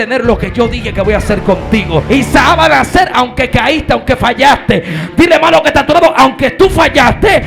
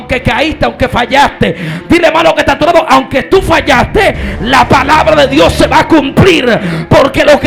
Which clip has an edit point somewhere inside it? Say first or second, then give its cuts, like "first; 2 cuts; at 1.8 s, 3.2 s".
first; 1 cut; at 2.0 s